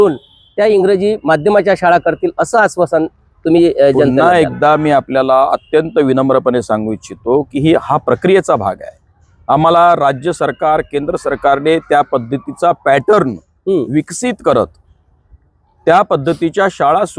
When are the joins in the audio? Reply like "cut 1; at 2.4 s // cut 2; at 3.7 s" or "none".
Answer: none